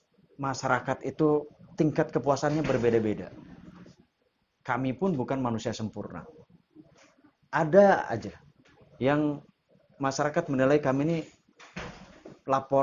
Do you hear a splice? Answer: no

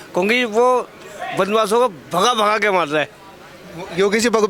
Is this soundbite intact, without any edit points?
yes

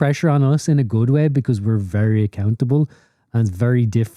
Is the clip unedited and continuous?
yes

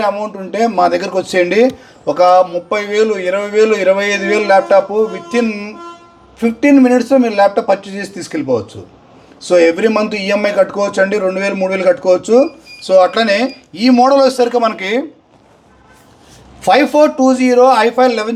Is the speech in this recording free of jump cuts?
yes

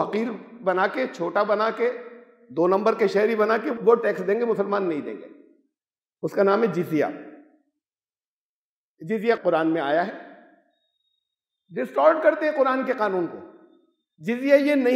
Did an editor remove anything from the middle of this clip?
no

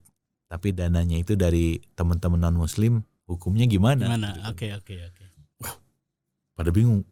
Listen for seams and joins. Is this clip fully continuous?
yes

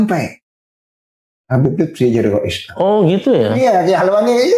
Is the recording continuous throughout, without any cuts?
no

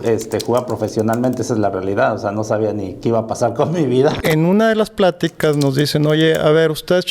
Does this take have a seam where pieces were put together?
yes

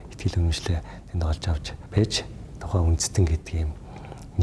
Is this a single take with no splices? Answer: yes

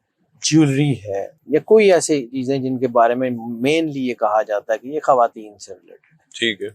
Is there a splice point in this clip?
yes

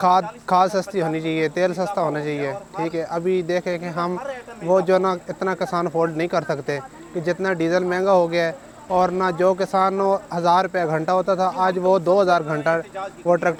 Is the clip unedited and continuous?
yes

